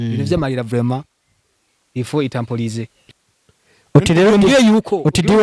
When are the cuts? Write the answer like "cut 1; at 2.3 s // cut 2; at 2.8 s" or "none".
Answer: cut 1; at 3.0 s